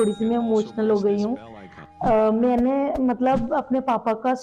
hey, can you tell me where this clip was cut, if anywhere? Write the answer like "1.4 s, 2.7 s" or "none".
none